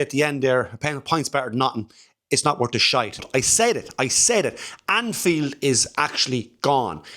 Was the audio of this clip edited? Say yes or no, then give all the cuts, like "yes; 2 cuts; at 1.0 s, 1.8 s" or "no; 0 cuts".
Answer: yes; 1 cut; at 3.2 s